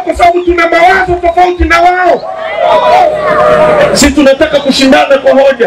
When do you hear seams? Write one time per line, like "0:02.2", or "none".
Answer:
none